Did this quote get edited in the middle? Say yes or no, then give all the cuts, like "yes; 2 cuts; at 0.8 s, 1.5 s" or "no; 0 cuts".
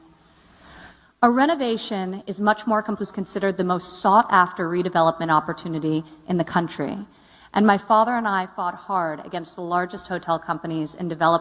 no; 0 cuts